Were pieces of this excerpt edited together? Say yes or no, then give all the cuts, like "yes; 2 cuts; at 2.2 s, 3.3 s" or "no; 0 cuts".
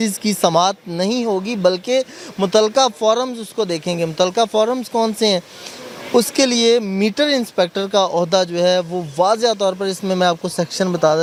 no; 0 cuts